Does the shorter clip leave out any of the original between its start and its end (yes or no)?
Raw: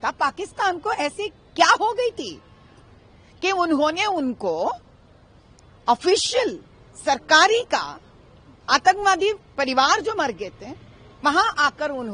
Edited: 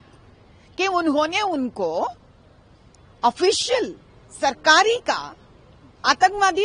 no